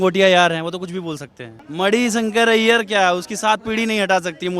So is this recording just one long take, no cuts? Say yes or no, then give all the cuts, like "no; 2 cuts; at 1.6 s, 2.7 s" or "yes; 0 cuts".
no; 1 cut; at 1.6 s